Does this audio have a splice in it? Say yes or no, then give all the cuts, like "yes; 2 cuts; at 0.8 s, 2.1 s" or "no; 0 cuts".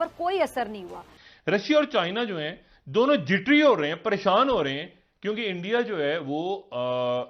yes; 1 cut; at 1.0 s